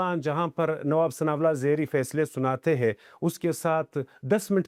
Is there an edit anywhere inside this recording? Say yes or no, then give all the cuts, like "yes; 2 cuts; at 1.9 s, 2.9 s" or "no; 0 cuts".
no; 0 cuts